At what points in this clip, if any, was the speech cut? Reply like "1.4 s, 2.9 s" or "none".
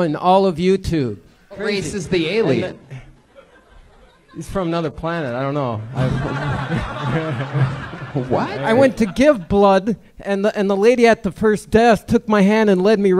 1.6 s, 8.6 s